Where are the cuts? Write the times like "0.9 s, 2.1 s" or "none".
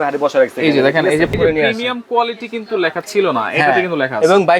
1.3 s